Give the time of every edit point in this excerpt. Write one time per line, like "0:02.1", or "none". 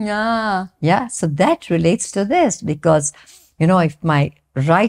none